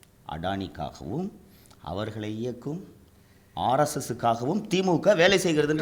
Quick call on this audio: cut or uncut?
uncut